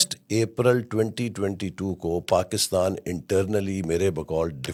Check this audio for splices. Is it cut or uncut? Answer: uncut